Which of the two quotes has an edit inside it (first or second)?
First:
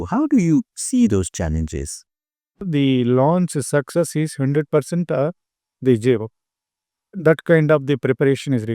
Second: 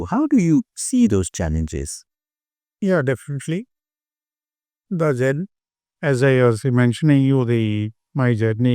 first